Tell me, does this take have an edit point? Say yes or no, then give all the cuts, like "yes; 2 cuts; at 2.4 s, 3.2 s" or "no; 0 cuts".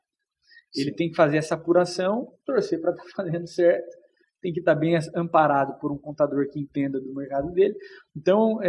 no; 0 cuts